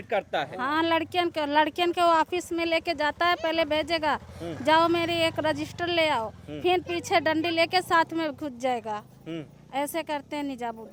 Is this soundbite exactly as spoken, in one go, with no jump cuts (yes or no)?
yes